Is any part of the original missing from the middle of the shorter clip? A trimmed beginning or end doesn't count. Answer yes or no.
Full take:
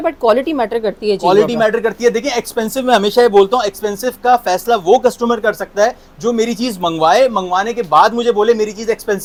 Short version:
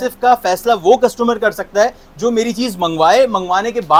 no